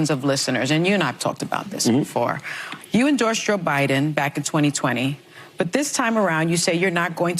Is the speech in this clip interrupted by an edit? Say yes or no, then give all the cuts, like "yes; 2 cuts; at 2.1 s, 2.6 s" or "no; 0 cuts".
no; 0 cuts